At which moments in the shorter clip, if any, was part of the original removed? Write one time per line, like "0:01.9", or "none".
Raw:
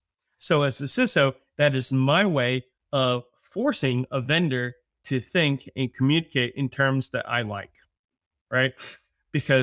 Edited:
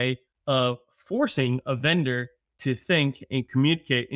none